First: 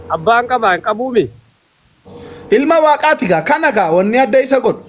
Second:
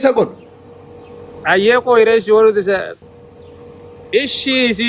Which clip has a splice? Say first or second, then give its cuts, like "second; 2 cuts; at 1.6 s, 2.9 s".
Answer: second; 1 cut; at 2.9 s